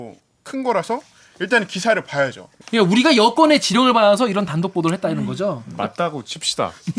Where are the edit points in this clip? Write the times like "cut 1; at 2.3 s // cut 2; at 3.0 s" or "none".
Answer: cut 1; at 2.5 s // cut 2; at 5.8 s